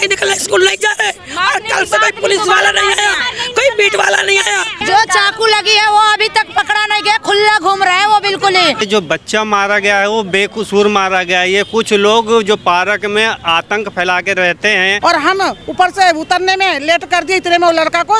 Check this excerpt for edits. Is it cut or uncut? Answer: cut